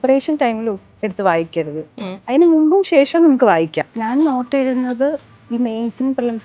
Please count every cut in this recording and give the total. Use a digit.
1